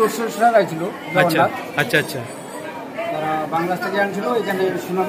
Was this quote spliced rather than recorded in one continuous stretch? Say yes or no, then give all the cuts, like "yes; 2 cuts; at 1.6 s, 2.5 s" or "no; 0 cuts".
no; 0 cuts